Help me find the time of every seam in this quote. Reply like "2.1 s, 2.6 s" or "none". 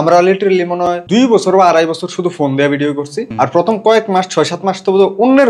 1.0 s, 3.2 s

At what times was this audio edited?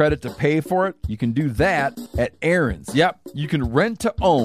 1.0 s, 2.0 s

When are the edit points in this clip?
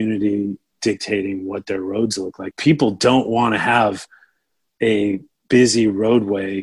2.5 s

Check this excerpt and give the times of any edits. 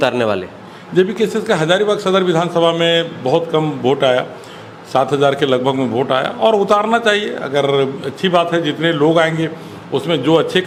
none

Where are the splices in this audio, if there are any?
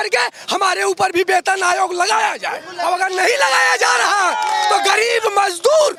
none

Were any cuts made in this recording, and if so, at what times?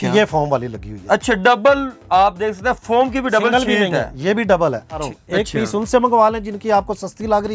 5.0 s

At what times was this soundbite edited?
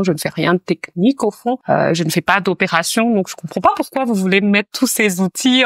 none

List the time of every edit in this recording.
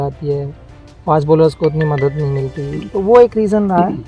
none

